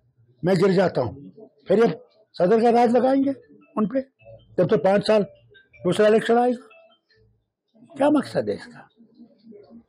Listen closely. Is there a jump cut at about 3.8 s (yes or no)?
no